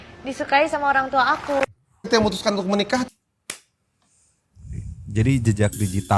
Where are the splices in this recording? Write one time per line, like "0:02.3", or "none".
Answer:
none